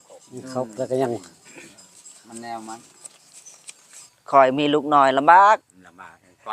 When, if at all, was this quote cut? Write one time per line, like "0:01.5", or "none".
0:04.1